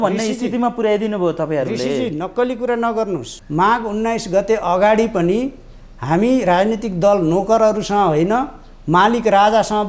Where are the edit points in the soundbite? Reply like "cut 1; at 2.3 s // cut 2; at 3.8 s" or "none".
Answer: cut 1; at 3.4 s